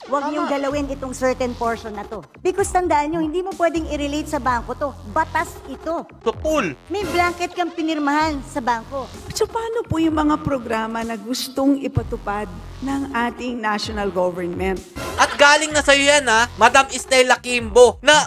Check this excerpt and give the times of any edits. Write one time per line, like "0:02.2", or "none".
0:09.2
0:14.9